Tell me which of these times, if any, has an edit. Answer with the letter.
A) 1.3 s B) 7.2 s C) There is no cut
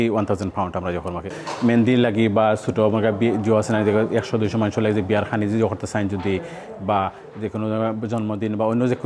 A